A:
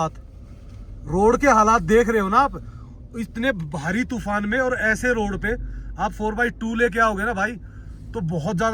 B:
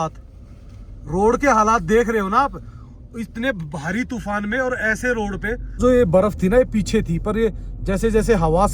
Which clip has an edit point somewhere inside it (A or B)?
B